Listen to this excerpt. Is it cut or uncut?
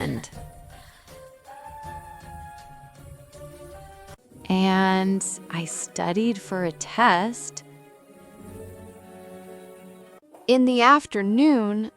cut